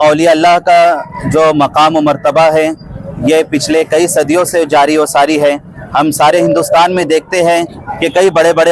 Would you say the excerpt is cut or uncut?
uncut